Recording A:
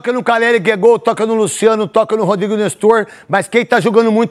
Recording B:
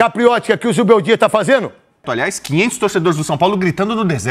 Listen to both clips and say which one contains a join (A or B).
B